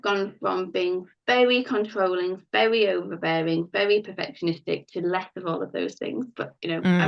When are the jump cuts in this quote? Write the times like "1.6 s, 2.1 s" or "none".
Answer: none

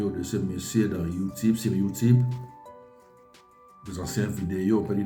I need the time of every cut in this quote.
2.4 s, 3.8 s

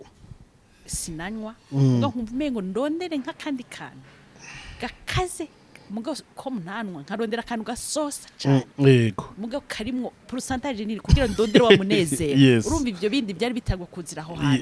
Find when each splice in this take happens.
none

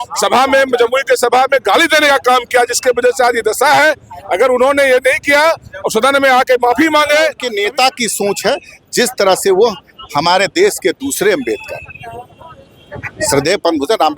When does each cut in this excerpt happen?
7.4 s

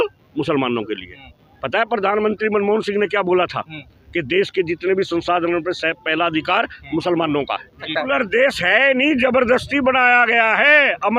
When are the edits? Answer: 7.9 s

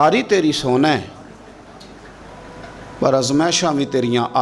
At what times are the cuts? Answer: none

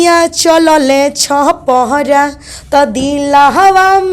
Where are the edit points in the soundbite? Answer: none

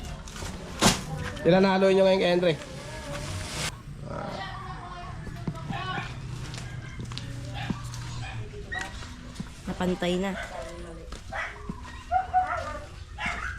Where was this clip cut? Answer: 3.7 s

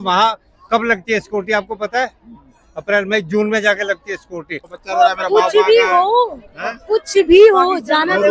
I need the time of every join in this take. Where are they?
4.7 s

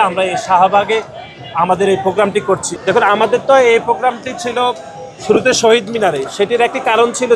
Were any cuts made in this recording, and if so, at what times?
2.7 s

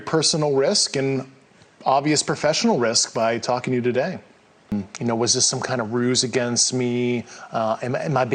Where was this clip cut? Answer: 4.7 s

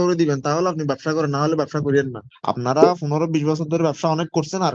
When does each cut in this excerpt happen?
2.2 s

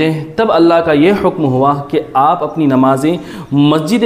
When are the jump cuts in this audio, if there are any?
none

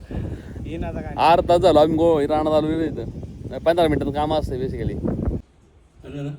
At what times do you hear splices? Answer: 5.4 s

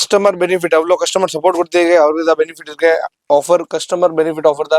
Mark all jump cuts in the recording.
none

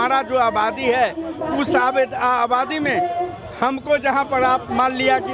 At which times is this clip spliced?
none

